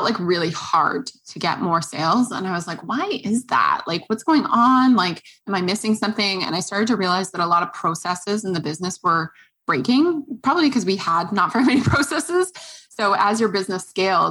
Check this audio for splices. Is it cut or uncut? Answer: uncut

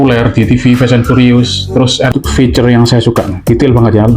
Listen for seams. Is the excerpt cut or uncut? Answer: cut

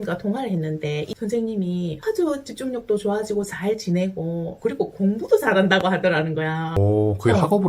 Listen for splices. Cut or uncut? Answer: cut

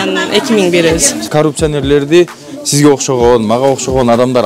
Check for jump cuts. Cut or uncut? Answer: cut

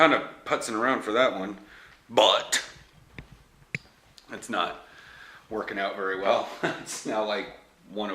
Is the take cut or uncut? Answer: uncut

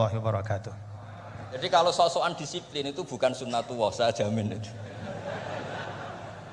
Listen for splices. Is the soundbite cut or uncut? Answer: cut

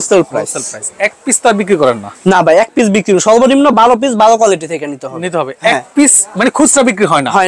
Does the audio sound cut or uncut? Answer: uncut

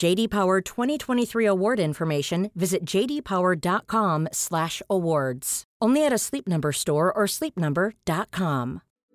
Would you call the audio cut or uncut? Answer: uncut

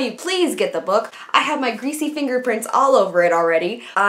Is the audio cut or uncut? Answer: uncut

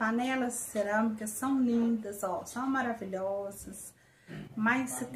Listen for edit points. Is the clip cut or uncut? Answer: uncut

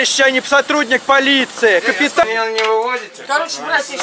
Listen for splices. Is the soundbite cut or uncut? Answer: cut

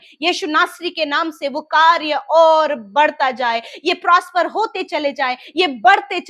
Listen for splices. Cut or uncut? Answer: uncut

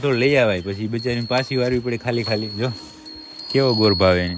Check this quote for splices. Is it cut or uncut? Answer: uncut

